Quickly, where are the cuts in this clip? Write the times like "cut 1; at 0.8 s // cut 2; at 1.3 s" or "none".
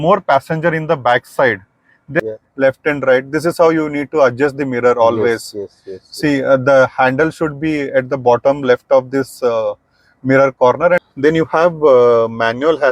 cut 1; at 2.2 s // cut 2; at 11.0 s